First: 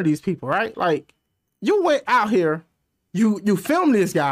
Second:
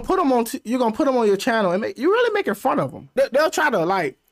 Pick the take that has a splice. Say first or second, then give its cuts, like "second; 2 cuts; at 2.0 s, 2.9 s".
second; 1 cut; at 3.1 s